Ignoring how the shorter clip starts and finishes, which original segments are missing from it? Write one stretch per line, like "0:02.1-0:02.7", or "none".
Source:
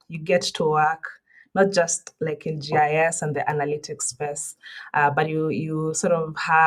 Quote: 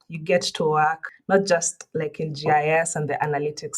0:01.1-0:01.4